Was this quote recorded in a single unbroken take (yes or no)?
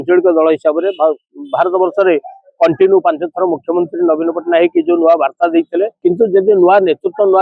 no